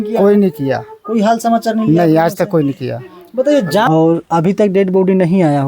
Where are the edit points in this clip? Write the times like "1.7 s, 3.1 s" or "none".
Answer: 3.9 s